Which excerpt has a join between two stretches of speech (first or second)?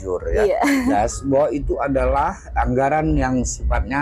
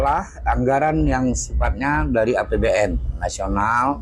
first